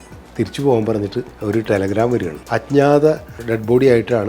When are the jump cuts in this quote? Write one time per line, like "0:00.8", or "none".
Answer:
0:01.3
0:02.4
0:03.4

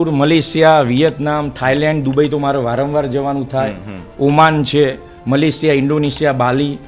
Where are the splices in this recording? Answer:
none

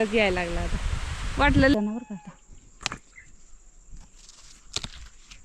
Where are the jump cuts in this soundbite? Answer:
0:01.7

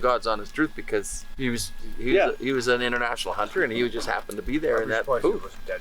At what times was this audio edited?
0:01.3

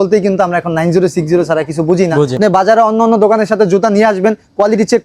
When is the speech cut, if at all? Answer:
0:02.4

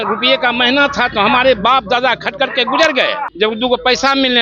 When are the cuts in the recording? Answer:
0:03.3

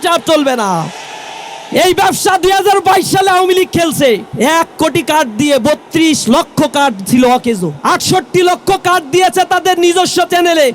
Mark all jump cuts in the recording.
0:04.3
0:07.7

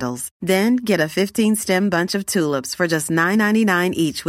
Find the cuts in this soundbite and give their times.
none

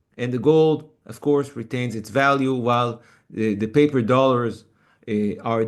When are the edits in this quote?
none

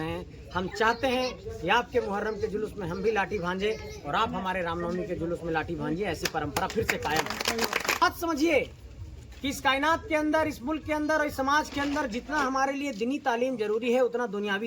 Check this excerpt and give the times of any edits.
0:08.0

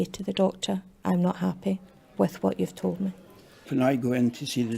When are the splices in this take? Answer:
0:02.0
0:03.7

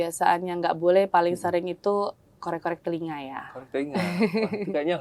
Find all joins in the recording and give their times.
none

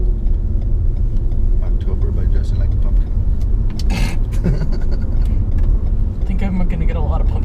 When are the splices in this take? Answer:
none

